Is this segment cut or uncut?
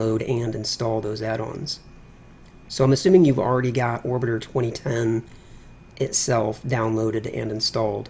cut